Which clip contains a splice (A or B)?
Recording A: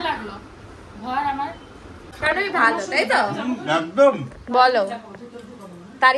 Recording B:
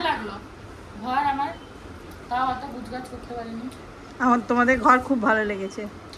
A